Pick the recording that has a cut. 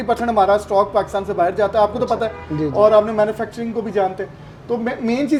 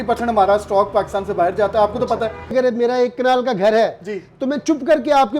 second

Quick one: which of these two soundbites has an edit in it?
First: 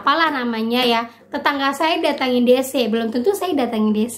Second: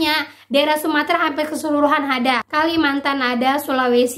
second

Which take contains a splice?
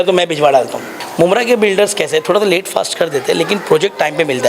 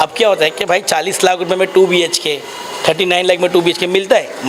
first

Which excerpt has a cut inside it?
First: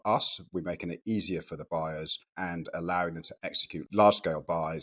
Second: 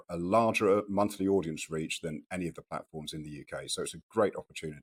first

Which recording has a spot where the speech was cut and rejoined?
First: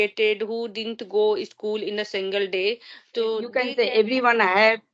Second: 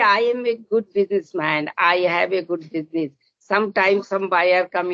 first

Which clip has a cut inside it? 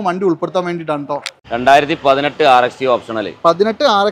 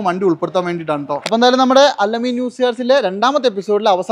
first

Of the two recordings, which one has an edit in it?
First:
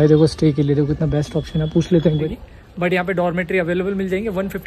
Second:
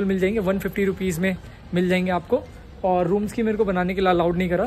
first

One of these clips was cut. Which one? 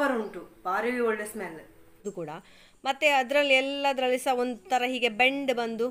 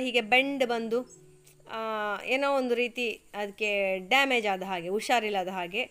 first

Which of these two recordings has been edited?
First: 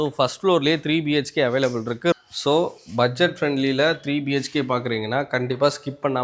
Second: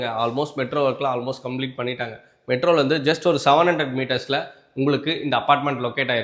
first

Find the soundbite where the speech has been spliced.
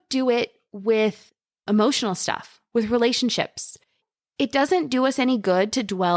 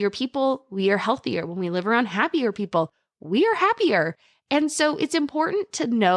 first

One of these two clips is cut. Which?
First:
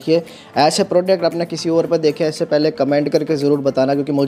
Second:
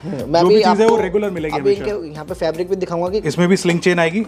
second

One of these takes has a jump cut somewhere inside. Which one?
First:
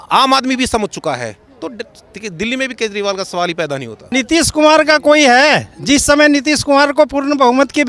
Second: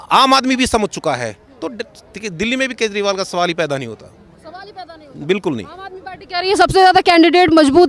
first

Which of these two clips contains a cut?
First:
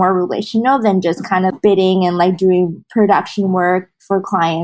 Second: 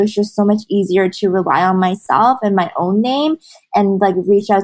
first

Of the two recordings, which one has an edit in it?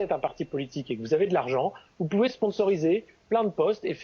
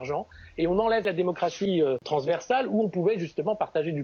second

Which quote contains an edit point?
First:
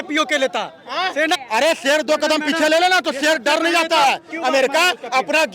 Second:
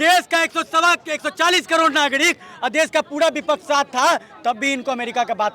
first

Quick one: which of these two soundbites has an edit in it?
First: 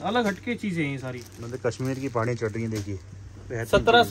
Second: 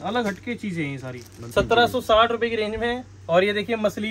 second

